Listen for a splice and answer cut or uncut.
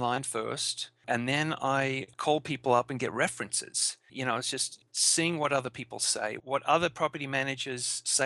cut